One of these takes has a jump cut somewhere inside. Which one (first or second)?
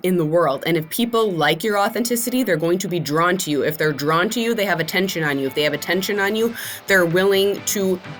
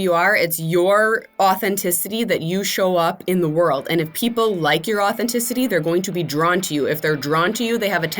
second